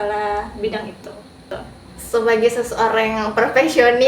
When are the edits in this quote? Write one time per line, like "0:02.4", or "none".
0:01.5